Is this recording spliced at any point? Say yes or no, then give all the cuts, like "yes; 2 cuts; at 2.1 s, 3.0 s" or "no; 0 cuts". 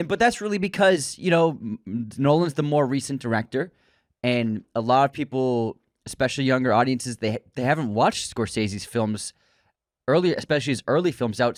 no; 0 cuts